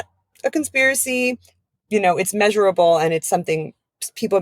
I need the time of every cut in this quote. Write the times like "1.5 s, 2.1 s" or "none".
1.5 s